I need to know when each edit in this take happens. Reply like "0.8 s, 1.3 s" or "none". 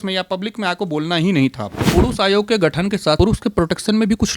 1.9 s, 3.2 s